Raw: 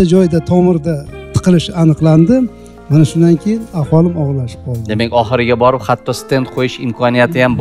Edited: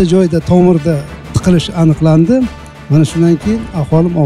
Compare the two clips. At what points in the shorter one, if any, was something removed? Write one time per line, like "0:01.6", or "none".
none